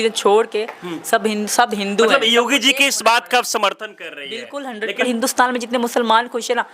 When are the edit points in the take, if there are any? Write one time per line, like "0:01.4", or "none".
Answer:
0:05.1